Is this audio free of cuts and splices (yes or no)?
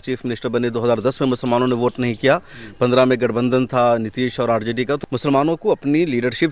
no